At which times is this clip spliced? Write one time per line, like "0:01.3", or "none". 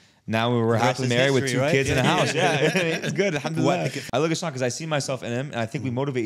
0:04.0